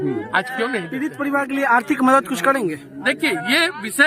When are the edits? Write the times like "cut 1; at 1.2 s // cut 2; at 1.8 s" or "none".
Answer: cut 1; at 1.1 s